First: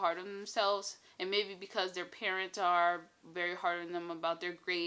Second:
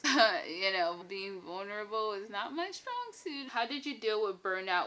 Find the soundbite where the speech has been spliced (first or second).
second